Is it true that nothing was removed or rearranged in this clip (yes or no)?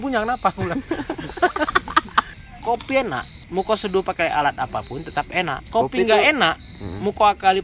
no